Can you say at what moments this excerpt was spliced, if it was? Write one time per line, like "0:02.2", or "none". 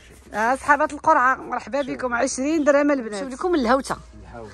0:03.3